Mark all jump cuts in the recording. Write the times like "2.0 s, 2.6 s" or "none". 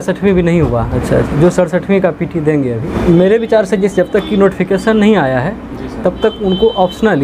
0.9 s, 2.9 s